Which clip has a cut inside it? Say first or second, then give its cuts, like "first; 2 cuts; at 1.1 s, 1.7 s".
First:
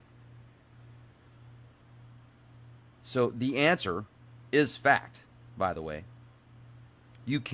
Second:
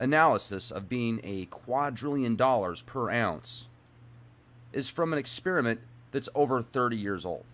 second; 1 cut; at 2.4 s